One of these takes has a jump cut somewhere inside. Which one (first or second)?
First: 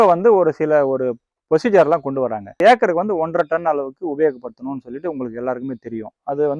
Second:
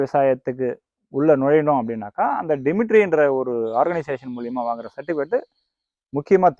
first